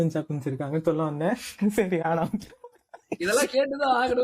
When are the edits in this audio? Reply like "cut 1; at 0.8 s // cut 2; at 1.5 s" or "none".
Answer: none